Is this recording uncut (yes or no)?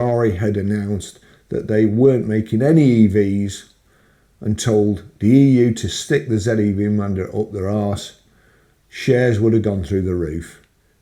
yes